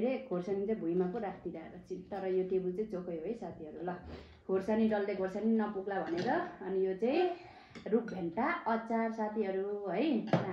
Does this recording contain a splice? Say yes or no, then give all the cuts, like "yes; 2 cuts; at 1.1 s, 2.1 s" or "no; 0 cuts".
no; 0 cuts